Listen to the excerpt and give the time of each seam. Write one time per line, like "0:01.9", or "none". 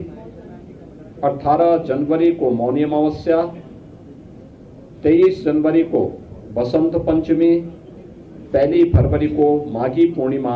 none